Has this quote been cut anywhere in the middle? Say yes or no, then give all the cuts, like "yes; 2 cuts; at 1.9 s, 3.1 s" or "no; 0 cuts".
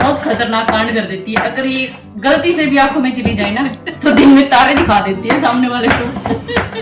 no; 0 cuts